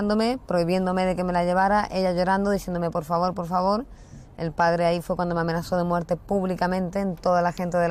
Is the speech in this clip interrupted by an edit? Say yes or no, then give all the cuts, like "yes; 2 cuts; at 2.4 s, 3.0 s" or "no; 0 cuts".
no; 0 cuts